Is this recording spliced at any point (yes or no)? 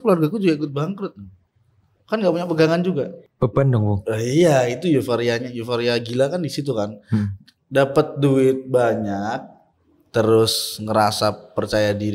yes